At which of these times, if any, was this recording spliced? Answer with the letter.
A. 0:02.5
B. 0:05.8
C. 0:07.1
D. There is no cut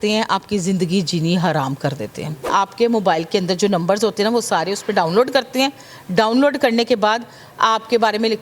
A